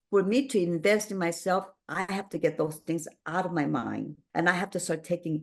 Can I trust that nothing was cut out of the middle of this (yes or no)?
no